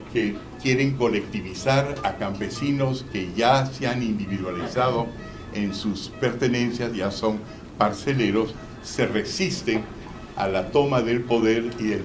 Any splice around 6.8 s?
no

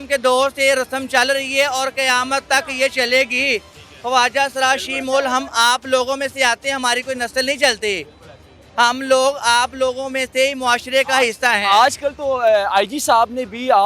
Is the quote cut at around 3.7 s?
no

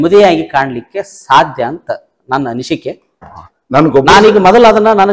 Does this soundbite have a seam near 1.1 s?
no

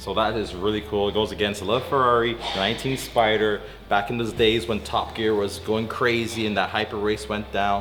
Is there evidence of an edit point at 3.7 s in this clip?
no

